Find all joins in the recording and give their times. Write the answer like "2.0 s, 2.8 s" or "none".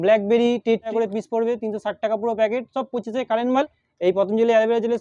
0.9 s, 3.8 s